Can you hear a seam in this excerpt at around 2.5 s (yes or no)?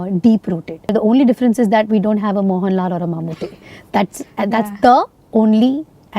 no